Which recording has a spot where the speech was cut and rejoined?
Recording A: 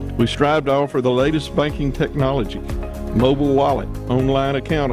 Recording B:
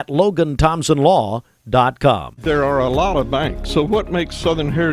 B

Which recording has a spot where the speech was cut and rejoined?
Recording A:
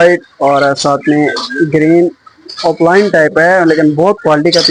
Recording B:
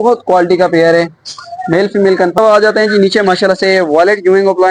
B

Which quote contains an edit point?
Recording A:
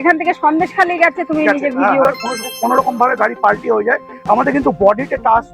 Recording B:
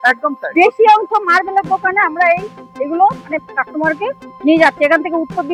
A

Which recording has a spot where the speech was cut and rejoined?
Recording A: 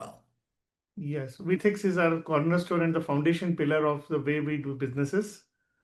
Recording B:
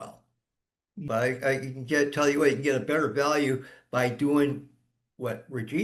B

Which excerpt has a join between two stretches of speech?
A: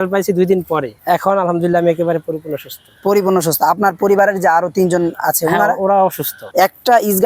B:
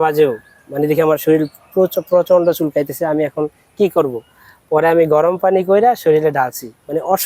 A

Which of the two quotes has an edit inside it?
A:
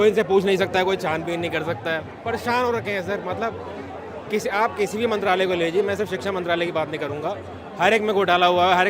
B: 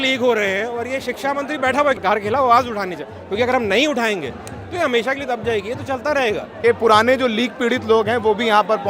B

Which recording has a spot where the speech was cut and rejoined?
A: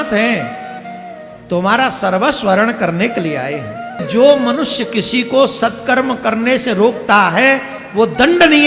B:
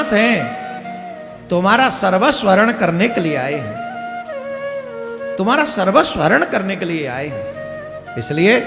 A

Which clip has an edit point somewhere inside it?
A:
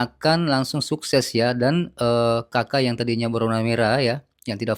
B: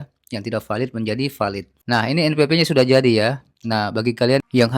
B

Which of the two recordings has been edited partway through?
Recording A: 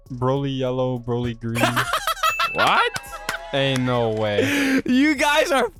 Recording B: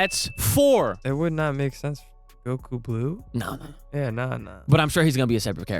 B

